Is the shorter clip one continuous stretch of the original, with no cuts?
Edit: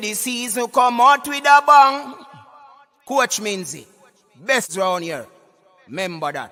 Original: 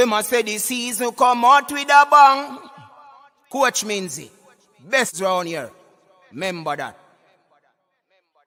yes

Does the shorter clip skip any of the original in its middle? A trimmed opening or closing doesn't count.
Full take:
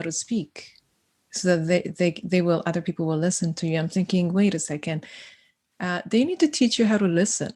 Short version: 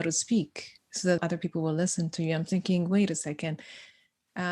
yes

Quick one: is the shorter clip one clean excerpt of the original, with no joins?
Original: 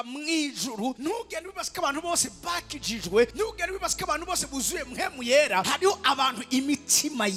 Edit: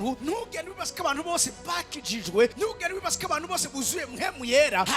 yes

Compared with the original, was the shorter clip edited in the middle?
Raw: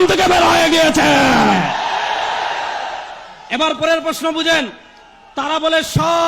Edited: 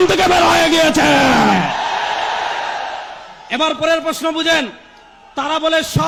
no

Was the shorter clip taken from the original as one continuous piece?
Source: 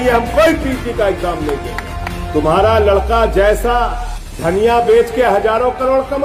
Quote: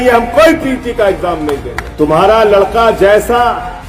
no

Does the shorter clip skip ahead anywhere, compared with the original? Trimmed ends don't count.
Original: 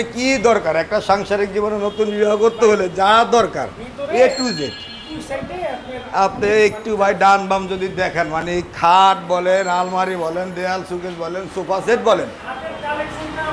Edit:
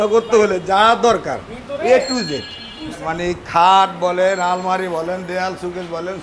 yes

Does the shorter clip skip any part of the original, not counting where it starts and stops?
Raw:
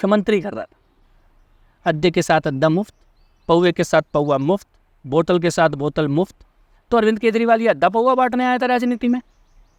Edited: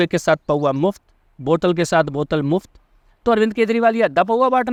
no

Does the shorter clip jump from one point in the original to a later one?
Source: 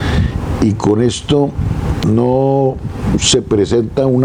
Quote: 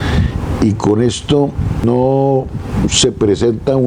yes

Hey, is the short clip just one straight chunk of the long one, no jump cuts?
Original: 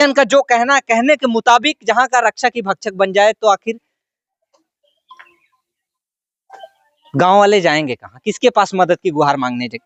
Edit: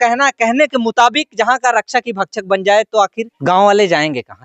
no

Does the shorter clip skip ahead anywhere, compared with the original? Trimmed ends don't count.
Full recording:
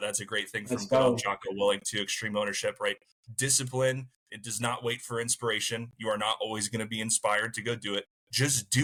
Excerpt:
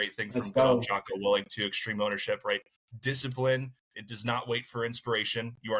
no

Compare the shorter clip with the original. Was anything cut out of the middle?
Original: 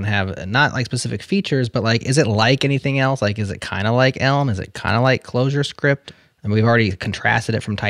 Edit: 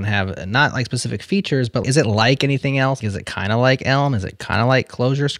yes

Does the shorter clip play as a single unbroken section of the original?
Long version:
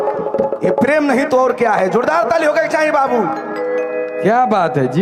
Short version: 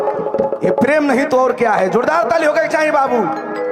yes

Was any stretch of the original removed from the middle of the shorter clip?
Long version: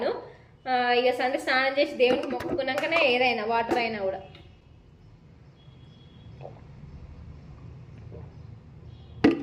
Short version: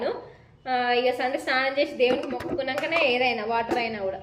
no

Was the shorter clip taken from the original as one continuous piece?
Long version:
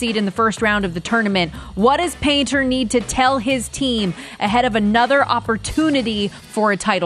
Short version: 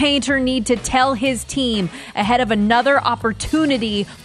yes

